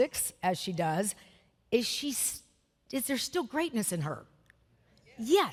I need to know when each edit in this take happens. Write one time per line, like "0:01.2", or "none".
none